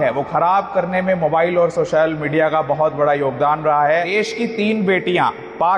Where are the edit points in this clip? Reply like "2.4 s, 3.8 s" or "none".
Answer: 4.1 s